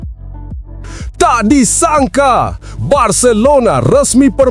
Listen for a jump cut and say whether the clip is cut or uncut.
cut